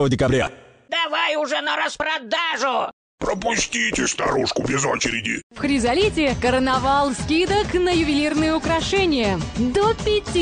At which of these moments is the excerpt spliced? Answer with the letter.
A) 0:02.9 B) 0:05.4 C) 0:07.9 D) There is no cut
B